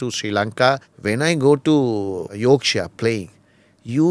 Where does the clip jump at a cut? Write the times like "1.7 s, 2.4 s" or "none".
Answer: 0.9 s, 2.3 s